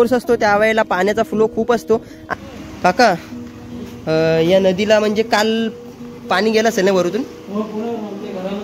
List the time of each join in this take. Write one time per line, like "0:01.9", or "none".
0:02.2